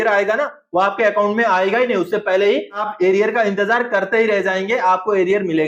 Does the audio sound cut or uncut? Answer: cut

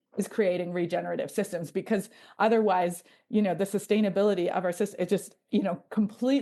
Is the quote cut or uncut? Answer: uncut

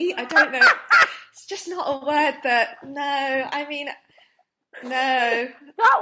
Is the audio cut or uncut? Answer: uncut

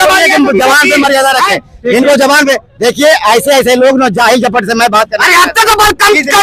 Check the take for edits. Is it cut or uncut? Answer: uncut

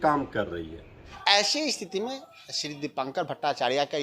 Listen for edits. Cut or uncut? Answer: cut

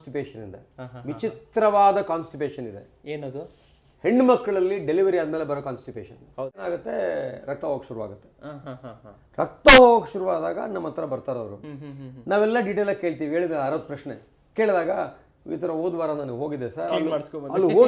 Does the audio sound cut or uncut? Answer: cut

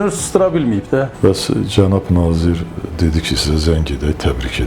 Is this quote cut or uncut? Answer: cut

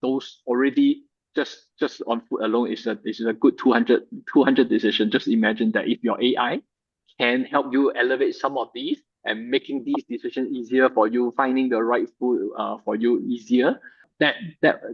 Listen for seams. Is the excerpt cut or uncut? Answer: cut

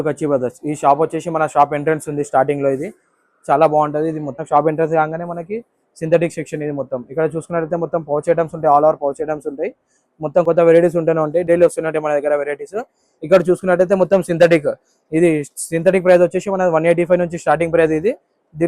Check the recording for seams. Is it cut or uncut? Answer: cut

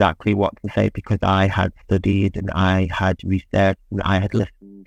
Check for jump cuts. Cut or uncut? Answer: uncut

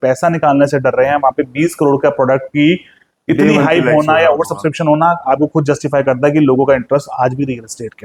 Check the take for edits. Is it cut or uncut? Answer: uncut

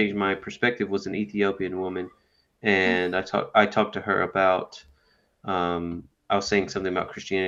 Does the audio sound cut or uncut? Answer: uncut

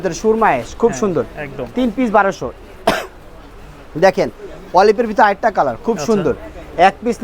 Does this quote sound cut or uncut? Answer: uncut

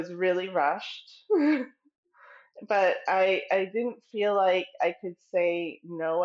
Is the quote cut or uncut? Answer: uncut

